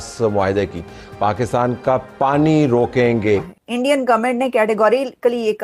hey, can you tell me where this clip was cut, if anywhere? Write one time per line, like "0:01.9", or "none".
0:03.6